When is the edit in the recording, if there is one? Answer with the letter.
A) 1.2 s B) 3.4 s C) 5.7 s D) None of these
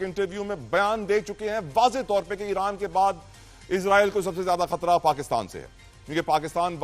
D